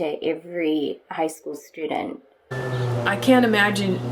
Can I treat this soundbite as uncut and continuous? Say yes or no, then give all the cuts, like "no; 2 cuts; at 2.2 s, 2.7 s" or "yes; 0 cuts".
no; 1 cut; at 2.5 s